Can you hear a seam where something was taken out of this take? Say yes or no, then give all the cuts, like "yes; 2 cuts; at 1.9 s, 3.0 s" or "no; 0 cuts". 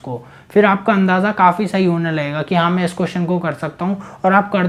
no; 0 cuts